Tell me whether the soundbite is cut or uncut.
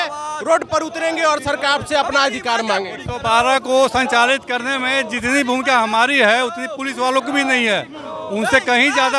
uncut